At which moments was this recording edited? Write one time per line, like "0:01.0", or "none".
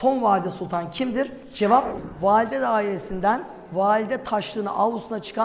0:02.0